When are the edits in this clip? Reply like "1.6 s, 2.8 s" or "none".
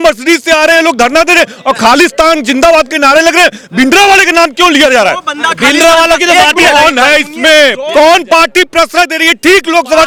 none